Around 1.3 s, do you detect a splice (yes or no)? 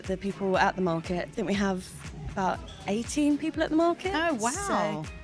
yes